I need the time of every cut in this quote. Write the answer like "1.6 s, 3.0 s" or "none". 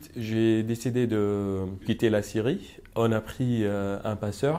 1.8 s